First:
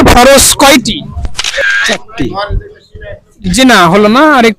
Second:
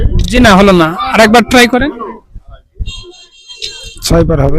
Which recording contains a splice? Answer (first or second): first